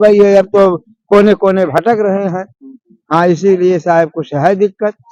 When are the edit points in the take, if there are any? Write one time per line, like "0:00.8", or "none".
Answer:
none